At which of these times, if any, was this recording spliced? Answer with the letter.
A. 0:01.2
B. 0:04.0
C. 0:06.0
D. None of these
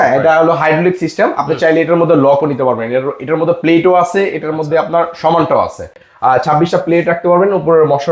C